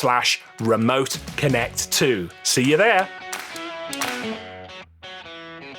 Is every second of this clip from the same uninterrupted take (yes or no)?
no